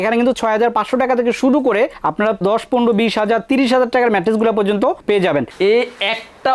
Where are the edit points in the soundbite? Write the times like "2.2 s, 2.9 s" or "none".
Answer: 5.5 s